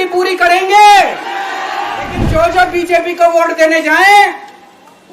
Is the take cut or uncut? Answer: cut